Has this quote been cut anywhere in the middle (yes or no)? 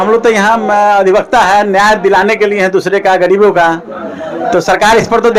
no